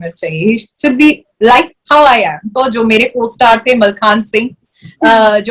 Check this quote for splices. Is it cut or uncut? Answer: cut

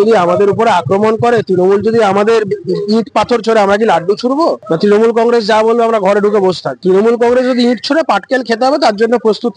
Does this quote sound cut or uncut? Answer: uncut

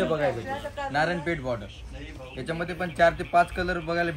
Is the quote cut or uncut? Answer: uncut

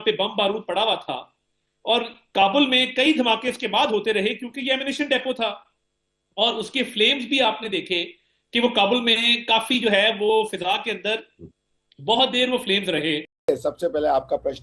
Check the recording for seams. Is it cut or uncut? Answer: cut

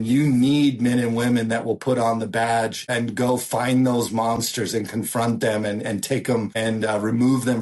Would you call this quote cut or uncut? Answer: cut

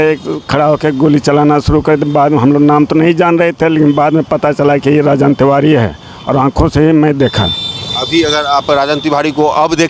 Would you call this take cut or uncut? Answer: uncut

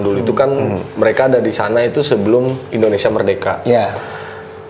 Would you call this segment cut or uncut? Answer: uncut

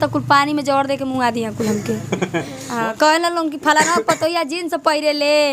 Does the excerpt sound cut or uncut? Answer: cut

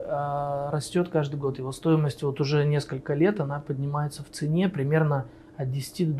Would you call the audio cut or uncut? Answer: uncut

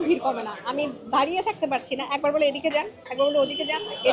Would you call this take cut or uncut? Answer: uncut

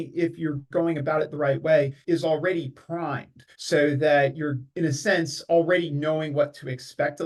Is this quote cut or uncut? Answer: uncut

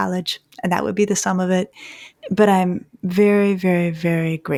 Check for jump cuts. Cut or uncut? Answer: uncut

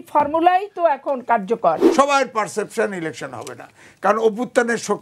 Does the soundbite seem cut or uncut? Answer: cut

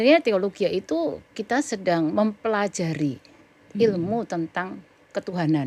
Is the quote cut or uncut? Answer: uncut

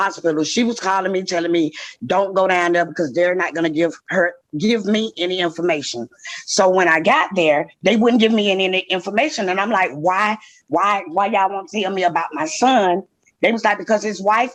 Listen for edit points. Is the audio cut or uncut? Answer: uncut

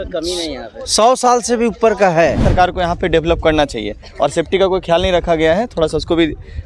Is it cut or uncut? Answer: cut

